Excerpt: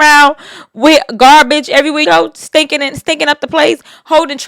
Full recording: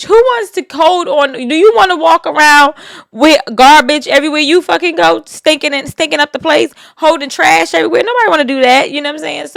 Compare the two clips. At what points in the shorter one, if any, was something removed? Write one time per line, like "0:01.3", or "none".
0:02.0